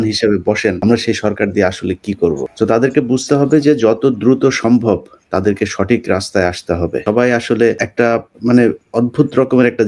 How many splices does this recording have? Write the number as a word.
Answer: two